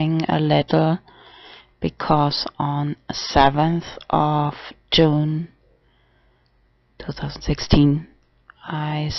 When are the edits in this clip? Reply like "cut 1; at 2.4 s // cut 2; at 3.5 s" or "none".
cut 1; at 5.4 s